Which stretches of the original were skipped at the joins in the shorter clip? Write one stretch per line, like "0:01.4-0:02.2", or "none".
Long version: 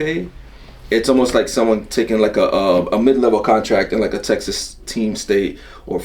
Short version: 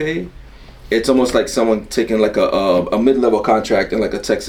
none